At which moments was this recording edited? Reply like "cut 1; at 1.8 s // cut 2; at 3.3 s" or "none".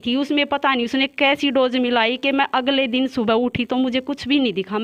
none